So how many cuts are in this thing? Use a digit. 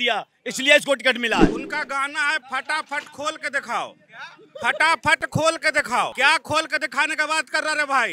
2